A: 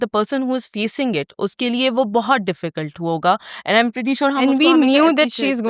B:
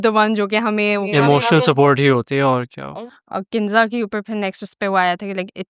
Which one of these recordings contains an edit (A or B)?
B